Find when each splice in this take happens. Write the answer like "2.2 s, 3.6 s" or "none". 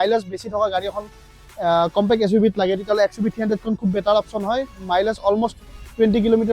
4.7 s